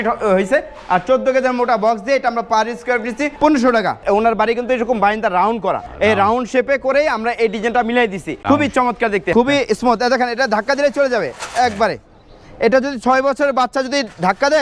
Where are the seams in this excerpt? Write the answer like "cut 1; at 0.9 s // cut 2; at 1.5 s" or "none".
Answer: cut 1; at 3.3 s // cut 2; at 4.0 s // cut 3; at 5.9 s // cut 4; at 8.3 s // cut 5; at 9.3 s